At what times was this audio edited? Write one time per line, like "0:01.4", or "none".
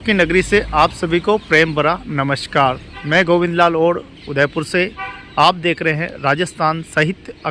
0:03.0